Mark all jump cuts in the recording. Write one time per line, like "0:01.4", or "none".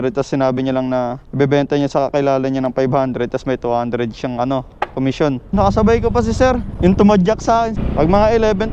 0:01.2
0:05.5
0:07.8